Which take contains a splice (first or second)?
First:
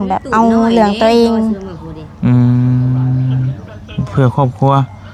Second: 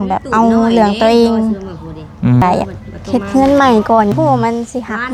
second